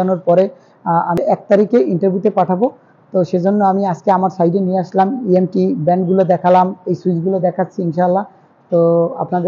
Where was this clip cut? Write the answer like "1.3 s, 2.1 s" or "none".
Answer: 1.2 s